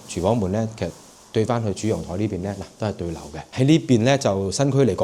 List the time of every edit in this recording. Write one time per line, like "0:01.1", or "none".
0:03.4